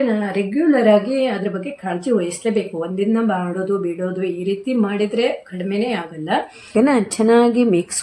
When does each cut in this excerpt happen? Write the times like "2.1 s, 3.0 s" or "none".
6.7 s